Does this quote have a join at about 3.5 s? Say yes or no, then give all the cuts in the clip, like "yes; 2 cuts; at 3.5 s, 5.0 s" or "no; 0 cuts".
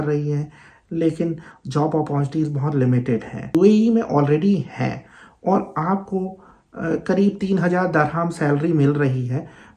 yes; 1 cut; at 3.5 s